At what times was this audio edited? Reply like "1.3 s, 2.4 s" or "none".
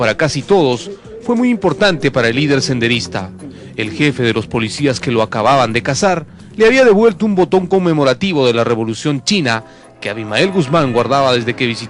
10.5 s